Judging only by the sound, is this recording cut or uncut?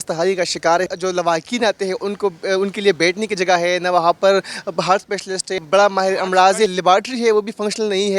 cut